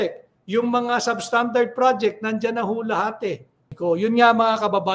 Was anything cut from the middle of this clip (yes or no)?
yes